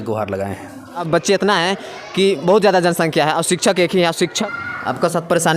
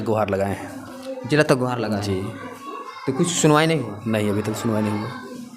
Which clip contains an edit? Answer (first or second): first